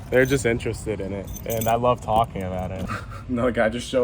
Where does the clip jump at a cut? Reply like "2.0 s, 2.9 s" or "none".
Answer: 2.8 s

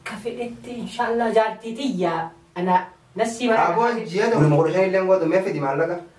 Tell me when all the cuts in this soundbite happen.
4.4 s

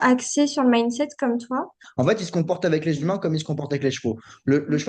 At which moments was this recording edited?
1.8 s

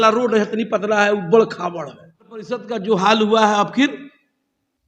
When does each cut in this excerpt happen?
2.6 s

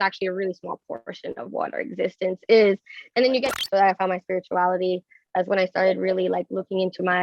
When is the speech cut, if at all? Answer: 3.6 s

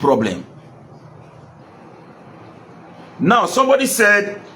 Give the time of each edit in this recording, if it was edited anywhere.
1.6 s

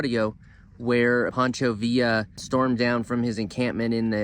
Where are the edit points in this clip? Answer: 1.3 s, 2.4 s

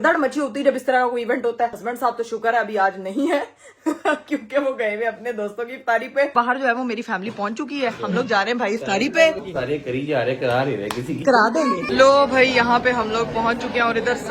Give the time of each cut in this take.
1.8 s, 6.3 s, 9.4 s, 11.8 s

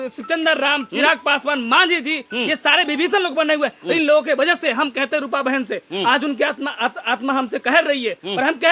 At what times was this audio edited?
none

